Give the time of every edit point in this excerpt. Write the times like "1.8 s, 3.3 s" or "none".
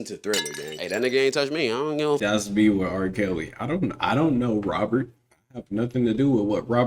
2.2 s